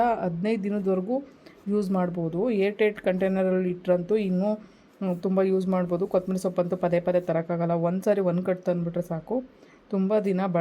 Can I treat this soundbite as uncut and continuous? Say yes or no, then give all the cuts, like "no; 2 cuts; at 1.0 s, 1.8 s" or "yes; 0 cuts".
yes; 0 cuts